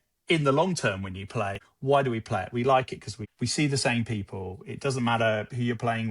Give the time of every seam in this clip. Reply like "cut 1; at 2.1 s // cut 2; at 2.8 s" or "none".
none